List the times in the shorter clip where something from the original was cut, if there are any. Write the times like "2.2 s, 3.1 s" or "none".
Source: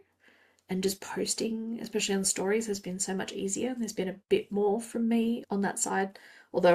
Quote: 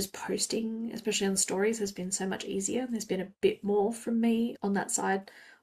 none